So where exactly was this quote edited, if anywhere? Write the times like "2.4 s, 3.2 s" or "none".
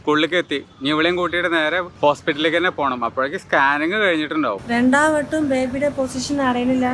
1.9 s, 4.6 s